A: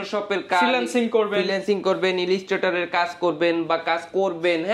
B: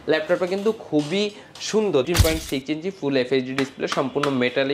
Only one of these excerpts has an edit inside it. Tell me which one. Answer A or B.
B